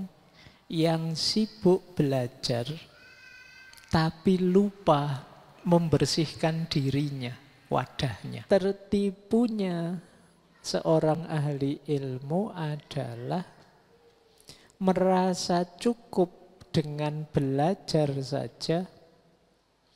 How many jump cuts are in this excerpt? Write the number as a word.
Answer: one